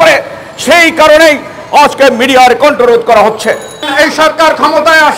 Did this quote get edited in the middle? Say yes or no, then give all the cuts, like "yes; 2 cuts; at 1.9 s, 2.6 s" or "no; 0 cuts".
yes; 1 cut; at 3.9 s